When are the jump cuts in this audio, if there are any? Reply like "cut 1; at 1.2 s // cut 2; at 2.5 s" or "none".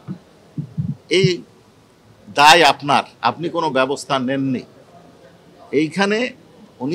none